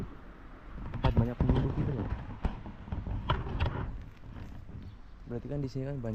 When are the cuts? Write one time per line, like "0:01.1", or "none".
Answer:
none